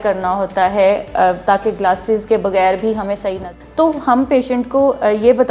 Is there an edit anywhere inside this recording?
yes; 1 cut; at 3.3 s

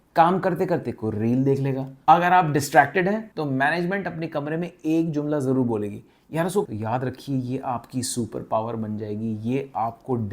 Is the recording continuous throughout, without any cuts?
no; 2 cuts; at 1.9 s, 6.7 s

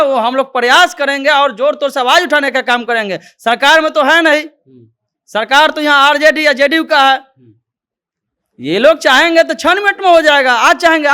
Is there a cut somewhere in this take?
no; 0 cuts

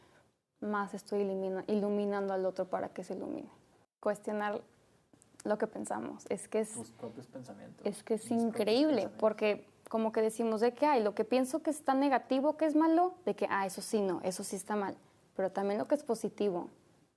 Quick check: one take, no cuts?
no; 1 cut; at 4.0 s

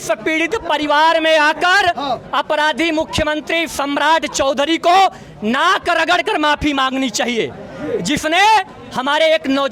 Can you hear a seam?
no; 0 cuts

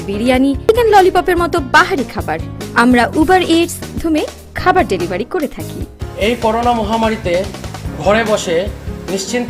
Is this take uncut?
no; 2 cuts; at 0.7 s, 4.0 s

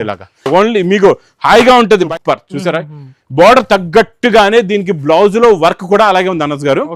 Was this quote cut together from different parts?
yes; 1 cut; at 2.1 s

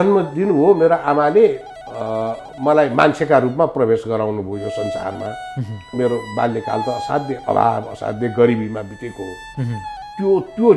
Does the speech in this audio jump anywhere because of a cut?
yes; 1 cut; at 5.9 s

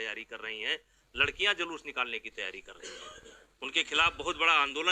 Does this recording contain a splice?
no; 0 cuts

